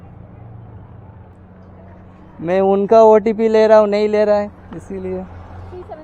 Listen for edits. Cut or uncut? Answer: cut